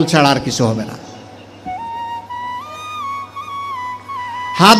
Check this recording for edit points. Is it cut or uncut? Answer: uncut